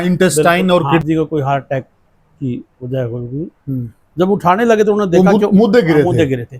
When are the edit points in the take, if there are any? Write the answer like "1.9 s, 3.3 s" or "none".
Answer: 1.0 s